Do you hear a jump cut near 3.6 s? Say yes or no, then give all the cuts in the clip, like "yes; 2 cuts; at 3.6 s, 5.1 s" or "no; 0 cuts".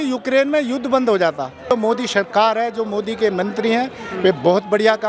no; 1 cut; at 1.7 s